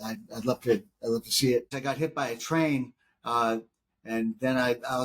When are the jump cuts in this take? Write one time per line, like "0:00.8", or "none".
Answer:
0:01.7